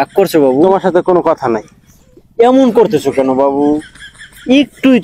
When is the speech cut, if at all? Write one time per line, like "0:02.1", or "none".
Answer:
none